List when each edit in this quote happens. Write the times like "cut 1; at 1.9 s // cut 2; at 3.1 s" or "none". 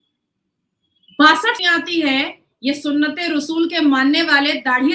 cut 1; at 1.6 s